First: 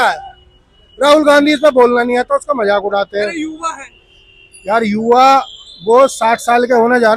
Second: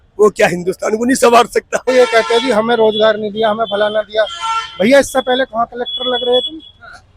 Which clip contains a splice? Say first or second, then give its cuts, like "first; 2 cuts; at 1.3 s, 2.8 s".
second; 1 cut; at 1.9 s